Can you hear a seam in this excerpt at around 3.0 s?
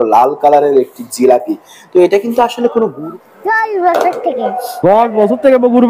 yes; 1 cut; at 3.0 s

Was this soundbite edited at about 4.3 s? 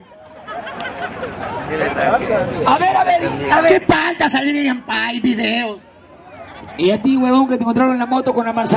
no; 0 cuts

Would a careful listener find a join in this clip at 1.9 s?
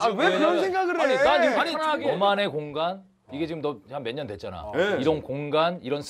yes; 1 cut; at 1.9 s

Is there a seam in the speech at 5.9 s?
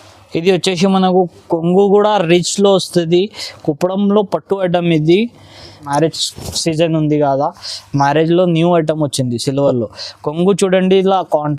yes; 1 cut; at 5.9 s

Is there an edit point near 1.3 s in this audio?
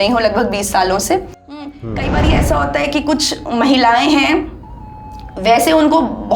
yes; 1 cut; at 1.3 s

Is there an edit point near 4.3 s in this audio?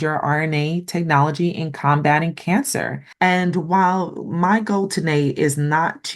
no; 1 cut; at 3.0 s

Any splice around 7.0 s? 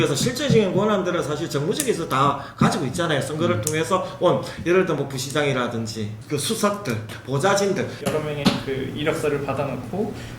yes; 2 cuts; at 7.0 s, 8.0 s

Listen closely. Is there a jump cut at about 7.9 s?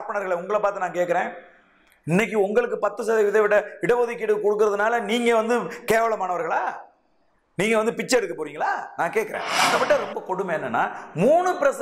no; 1 cut; at 9.5 s

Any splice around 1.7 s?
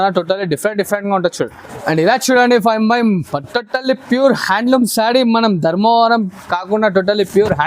yes; 1 cut; at 1.7 s

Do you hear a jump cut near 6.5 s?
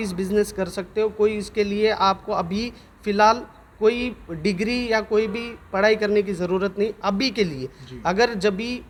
no; 0 cuts

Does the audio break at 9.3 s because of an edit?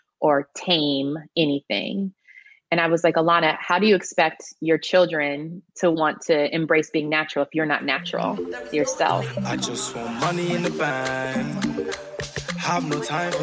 yes; 1 cut; at 9.3 s

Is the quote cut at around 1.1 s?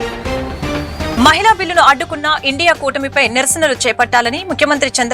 yes; 1 cut; at 1.1 s

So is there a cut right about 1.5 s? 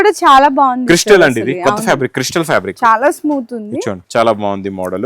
no; 1 cut; at 4.0 s

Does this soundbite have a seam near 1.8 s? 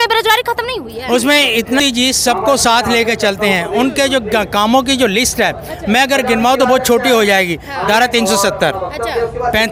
yes; 1 cut; at 1.8 s

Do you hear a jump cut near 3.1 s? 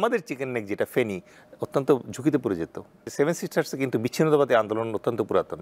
yes; 1 cut; at 3.1 s

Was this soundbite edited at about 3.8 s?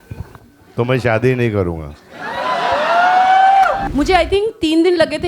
yes; 1 cut; at 3.8 s

